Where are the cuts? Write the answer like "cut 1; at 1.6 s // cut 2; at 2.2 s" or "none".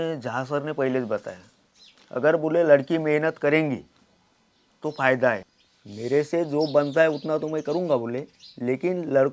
cut 1; at 5.4 s